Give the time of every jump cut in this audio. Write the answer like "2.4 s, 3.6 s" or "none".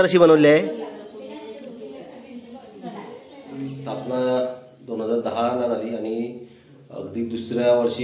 3.8 s